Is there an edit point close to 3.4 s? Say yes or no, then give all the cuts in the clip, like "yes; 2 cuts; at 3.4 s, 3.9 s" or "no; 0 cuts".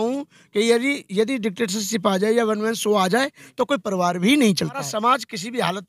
no; 1 cut; at 4.9 s